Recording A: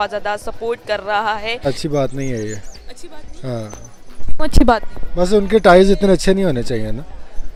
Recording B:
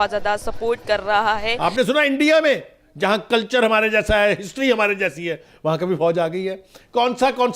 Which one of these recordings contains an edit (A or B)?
B